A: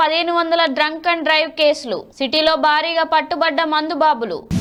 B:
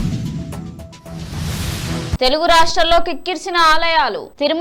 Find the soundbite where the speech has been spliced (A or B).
B